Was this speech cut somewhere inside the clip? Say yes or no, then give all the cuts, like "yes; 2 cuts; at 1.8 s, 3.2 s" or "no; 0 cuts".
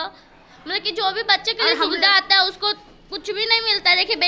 no; 0 cuts